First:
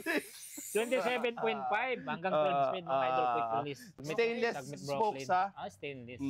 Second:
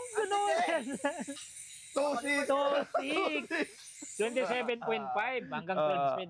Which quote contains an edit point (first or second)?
first